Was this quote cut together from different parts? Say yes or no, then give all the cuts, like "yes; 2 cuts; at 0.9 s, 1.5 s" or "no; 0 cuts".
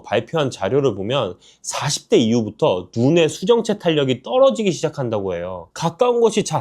yes; 1 cut; at 5.7 s